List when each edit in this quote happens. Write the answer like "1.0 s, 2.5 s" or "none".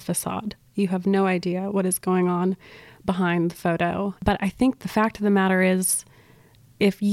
4.2 s